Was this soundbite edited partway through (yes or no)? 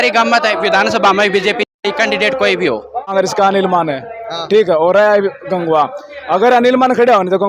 yes